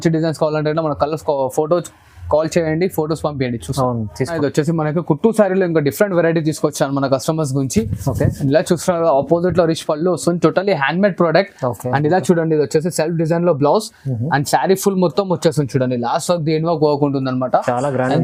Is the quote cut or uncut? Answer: uncut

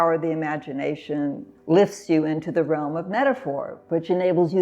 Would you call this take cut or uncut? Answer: cut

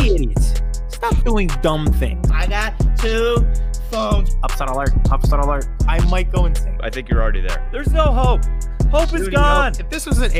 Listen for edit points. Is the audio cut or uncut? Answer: uncut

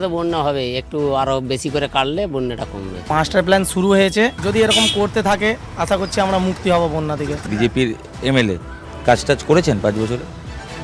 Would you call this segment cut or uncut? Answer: cut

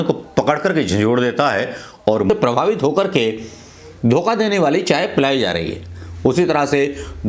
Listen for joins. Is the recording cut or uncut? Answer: cut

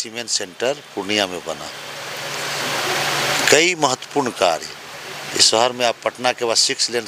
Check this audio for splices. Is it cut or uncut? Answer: uncut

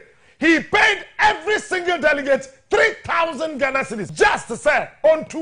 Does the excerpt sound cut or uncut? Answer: cut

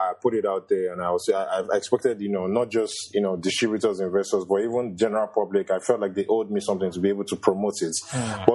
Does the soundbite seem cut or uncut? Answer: uncut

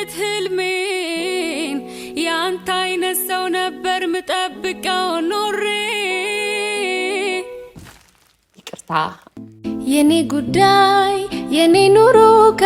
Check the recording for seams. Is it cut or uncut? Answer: cut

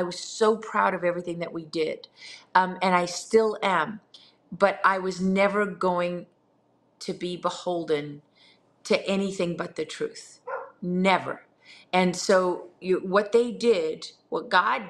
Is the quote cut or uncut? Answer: uncut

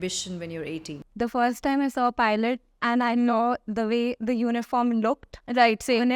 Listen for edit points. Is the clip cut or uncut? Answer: cut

